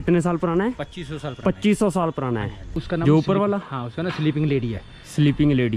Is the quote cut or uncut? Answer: cut